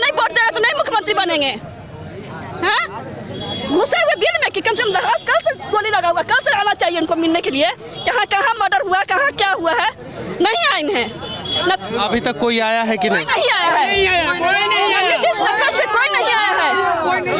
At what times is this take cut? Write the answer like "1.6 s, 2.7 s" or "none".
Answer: none